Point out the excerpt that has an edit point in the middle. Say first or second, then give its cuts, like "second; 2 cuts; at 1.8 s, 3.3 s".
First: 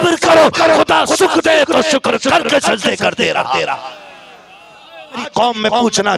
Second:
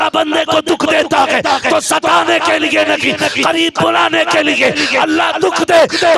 first; 1 cut; at 5.3 s